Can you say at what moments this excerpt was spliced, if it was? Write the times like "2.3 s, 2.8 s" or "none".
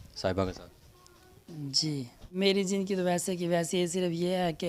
2.3 s